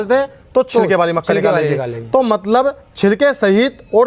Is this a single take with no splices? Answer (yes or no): yes